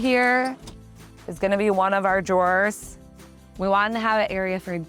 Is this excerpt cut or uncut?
cut